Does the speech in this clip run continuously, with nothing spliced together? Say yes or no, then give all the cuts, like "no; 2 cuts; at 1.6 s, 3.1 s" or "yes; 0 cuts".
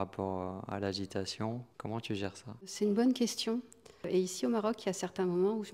no; 3 cuts; at 1.7 s, 2.7 s, 4.1 s